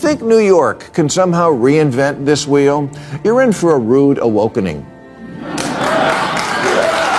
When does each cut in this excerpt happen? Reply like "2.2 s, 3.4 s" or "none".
none